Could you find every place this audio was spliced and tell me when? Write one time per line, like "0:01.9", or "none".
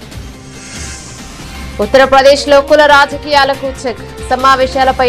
0:01.8